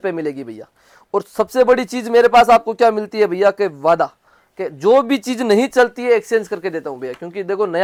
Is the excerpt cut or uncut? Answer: uncut